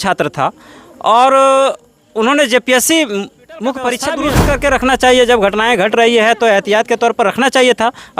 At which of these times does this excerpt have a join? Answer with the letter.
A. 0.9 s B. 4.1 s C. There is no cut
B